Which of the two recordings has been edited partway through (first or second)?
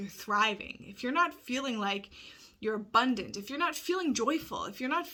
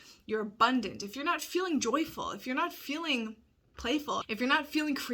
second